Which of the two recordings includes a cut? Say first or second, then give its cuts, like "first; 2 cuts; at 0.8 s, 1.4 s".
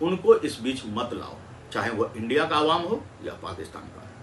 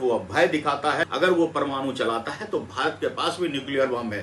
second; 1 cut; at 1.0 s